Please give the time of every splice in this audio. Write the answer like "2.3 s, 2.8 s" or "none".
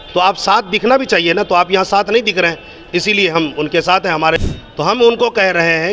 4.4 s